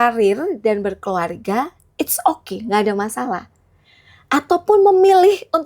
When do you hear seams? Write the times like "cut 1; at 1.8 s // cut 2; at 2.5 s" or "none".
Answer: none